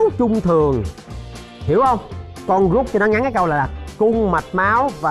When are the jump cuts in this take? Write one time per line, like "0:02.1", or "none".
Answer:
0:02.4